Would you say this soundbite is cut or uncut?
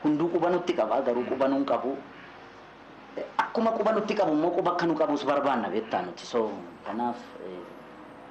uncut